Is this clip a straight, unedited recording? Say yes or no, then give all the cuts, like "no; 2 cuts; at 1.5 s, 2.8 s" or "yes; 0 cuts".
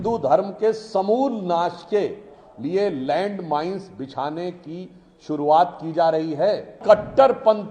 no; 1 cut; at 6.8 s